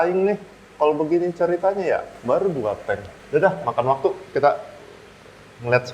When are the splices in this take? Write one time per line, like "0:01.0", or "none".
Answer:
0:02.1
0:03.1